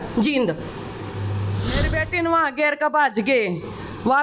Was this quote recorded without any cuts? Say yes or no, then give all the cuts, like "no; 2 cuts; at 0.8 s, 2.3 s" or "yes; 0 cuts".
no; 1 cut; at 2.0 s